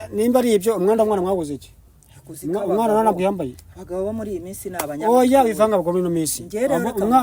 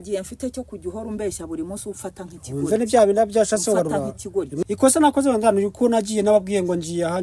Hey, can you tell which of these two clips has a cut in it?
second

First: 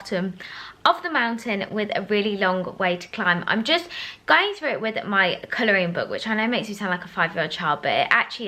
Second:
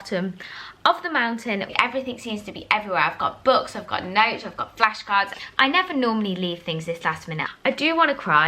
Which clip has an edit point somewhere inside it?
second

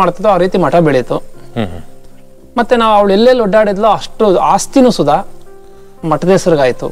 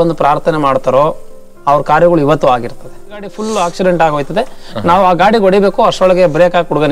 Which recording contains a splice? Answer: second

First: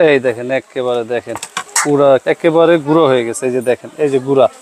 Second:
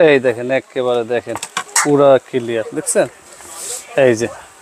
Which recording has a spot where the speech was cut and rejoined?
first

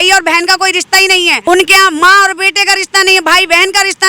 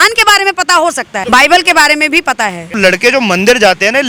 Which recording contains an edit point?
first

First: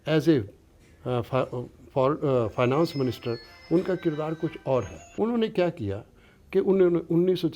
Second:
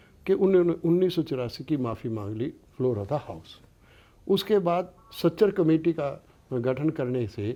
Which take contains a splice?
first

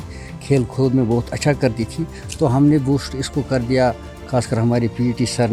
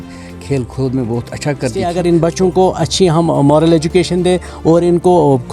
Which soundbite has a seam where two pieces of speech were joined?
second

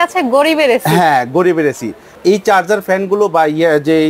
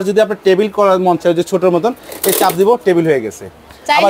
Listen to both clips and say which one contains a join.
first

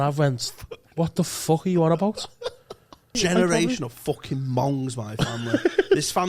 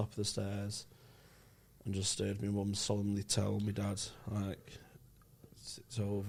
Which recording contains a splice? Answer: first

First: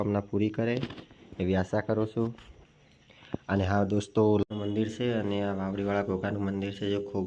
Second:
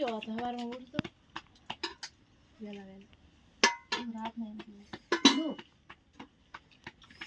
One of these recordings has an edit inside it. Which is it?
first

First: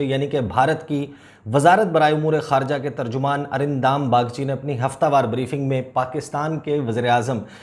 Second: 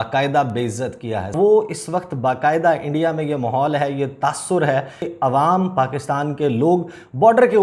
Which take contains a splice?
second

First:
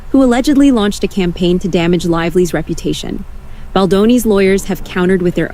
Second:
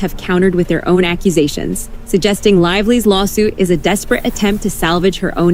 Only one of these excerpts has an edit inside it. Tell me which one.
first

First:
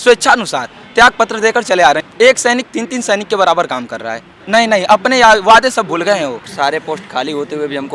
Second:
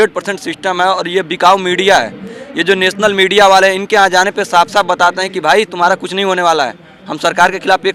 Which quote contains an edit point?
first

